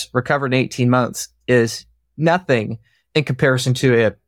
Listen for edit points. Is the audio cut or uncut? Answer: uncut